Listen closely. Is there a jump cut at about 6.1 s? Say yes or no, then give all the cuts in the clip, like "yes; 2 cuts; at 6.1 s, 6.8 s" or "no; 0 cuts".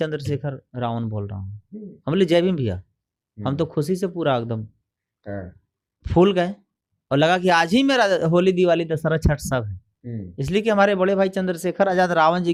no; 0 cuts